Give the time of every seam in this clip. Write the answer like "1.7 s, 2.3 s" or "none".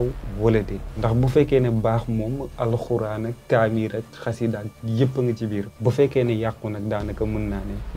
none

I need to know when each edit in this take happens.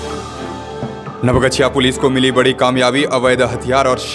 1.0 s

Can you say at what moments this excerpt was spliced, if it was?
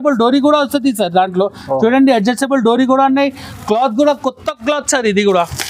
none

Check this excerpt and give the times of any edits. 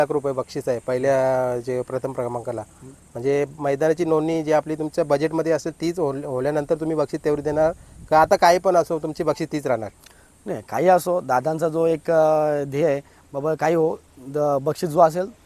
none

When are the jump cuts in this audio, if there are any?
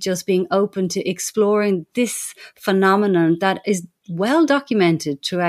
none

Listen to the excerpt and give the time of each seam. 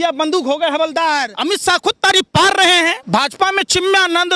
1.3 s, 3.0 s

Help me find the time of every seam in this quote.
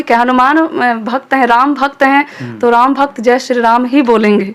none

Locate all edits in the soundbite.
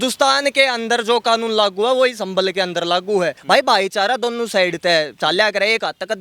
3.4 s

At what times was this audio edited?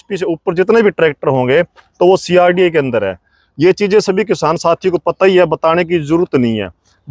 none

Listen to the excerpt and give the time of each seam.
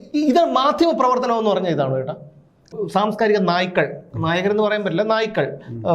2.7 s

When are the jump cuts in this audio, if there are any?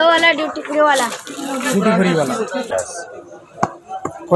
2.7 s

